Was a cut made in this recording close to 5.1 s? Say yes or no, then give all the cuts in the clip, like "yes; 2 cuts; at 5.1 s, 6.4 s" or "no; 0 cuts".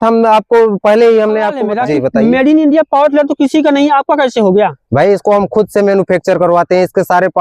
no; 1 cut; at 1.6 s